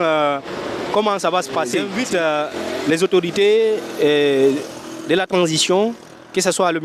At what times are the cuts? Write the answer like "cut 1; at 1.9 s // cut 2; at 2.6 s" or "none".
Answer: cut 1; at 1.9 s